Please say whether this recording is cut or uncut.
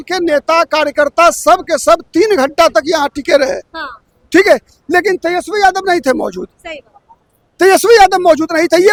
uncut